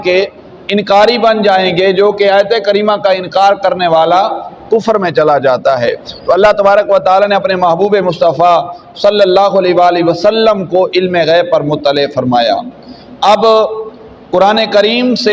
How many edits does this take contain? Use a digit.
0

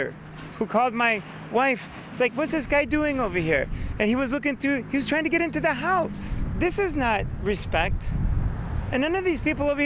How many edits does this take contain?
1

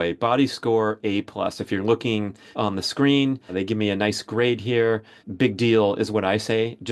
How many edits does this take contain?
3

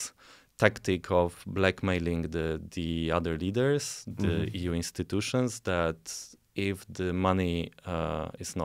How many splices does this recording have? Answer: 0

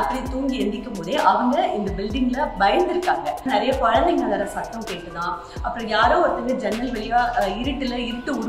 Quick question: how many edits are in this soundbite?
1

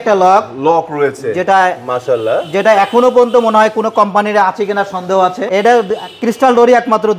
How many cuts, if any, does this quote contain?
1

